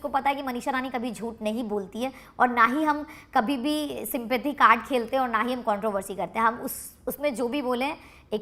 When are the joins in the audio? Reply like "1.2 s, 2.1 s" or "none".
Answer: none